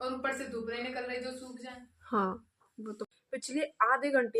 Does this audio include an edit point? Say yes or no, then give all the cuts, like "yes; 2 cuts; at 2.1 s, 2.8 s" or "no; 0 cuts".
yes; 1 cut; at 3.0 s